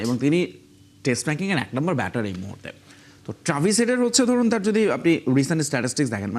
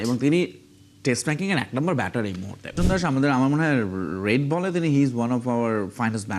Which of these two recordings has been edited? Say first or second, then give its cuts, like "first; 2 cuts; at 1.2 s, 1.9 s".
second; 1 cut; at 2.8 s